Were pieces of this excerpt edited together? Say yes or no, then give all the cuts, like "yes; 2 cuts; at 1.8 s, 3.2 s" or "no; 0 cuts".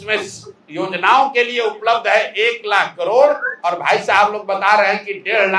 no; 0 cuts